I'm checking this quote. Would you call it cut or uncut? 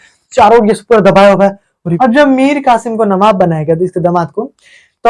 cut